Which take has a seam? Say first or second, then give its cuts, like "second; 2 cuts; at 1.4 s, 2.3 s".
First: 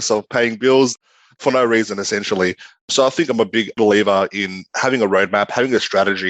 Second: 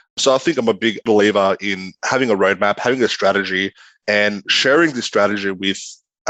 first; 1 cut; at 1.0 s